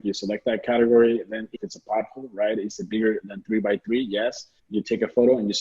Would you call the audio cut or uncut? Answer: cut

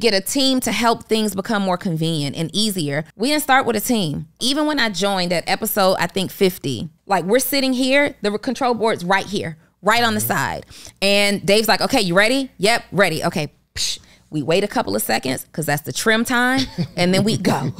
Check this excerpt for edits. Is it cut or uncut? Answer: cut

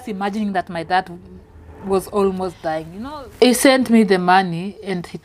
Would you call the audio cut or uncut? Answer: cut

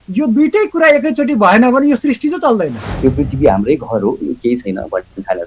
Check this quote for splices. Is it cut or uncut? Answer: cut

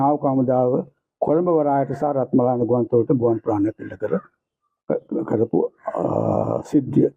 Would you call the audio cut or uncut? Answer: uncut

